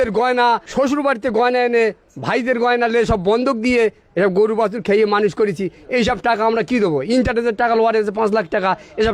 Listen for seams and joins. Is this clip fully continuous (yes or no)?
yes